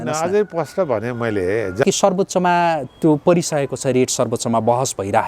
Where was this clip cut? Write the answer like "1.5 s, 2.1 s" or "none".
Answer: 1.8 s

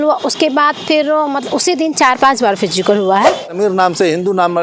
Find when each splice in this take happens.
3.5 s

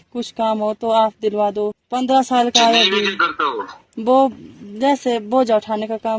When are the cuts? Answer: 1.8 s

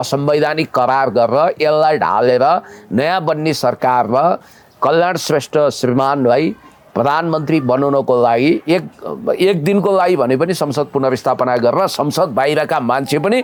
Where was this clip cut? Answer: none

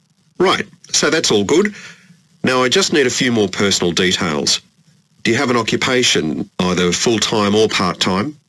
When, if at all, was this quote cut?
3.5 s, 6.4 s

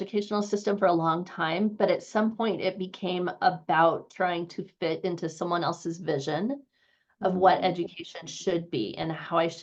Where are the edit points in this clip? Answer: none

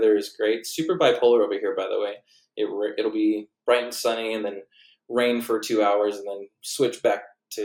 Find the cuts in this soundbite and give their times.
none

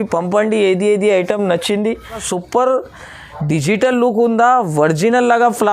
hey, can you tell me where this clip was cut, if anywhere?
2.2 s

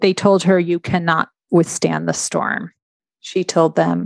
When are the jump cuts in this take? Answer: 2.9 s

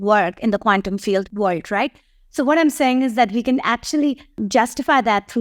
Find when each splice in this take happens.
1.3 s, 4.4 s

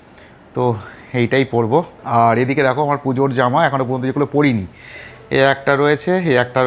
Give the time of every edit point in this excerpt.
2.0 s

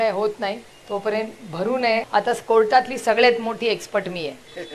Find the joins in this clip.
2.0 s

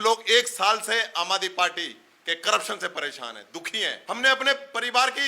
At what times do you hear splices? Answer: 3.9 s

